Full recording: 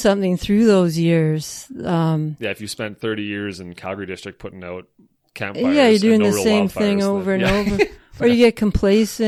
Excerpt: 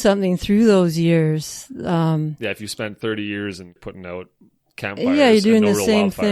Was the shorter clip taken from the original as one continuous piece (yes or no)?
no